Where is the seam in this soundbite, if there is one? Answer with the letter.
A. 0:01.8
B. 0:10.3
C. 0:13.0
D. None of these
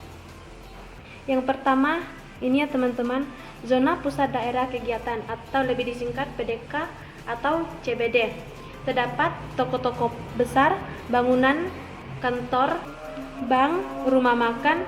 C